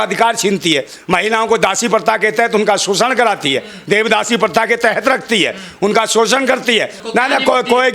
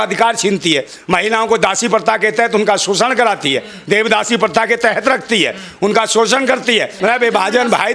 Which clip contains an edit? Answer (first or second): second